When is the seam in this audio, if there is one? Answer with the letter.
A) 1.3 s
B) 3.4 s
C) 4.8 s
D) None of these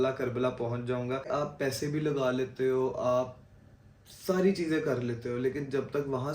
A